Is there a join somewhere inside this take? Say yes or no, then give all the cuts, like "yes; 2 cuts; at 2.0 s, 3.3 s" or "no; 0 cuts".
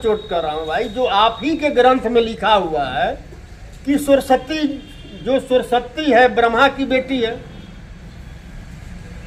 no; 0 cuts